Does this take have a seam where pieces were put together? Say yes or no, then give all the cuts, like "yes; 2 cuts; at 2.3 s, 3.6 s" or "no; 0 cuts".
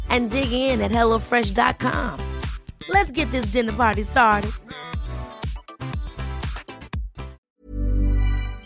yes; 1 cut; at 7.4 s